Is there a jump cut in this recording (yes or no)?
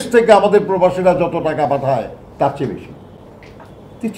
no